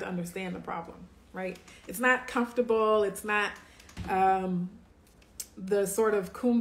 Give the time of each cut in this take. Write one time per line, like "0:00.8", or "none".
none